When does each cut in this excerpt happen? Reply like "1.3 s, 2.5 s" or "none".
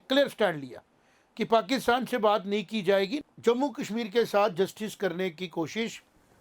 3.2 s